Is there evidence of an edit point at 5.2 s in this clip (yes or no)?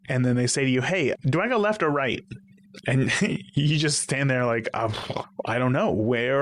yes